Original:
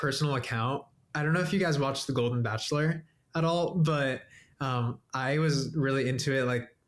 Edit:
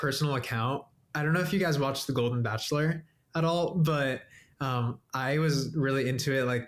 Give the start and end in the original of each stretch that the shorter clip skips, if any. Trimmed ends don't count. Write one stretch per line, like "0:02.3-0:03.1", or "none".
none